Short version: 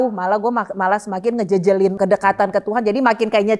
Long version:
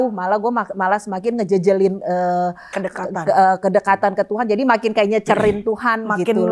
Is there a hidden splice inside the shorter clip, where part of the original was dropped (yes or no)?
yes